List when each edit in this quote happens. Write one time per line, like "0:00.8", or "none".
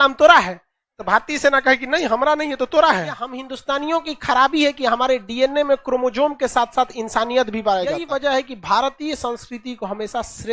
0:03.5
0:08.0